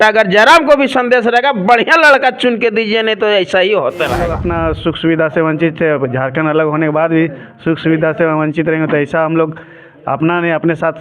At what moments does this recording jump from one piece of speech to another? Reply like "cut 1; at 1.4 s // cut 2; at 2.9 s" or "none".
cut 1; at 4.4 s